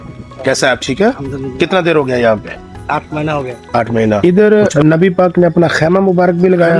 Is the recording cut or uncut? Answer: cut